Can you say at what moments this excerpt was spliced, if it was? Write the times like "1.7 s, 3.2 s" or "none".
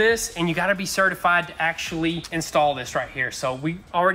2.2 s